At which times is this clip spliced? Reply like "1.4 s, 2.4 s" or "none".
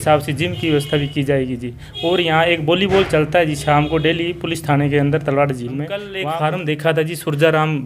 6.1 s